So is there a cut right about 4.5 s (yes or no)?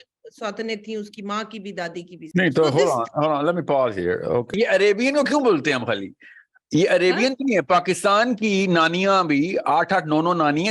yes